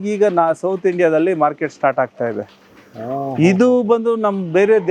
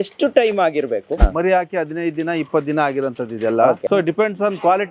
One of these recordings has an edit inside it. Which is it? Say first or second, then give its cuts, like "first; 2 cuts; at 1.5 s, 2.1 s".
second; 2 cuts; at 1.1 s, 3.8 s